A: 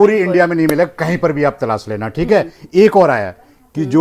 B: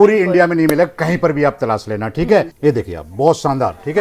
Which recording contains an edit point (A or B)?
B